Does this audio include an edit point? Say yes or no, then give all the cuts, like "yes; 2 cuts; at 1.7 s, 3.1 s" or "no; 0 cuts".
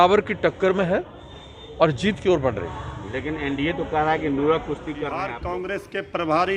yes; 1 cut; at 5.1 s